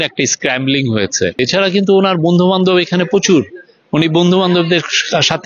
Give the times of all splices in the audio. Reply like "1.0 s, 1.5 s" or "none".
1.4 s